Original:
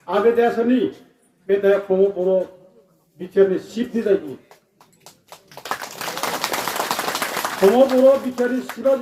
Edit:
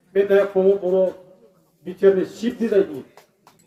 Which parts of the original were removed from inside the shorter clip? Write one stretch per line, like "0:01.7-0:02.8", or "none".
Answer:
none